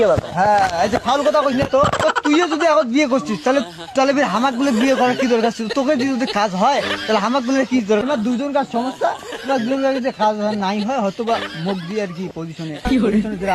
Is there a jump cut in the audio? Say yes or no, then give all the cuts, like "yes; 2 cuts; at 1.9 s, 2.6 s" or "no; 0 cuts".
yes; 1 cut; at 8.0 s